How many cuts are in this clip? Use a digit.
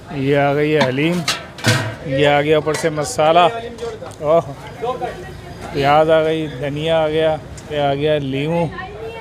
2